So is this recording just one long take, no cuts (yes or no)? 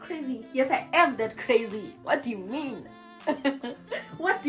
yes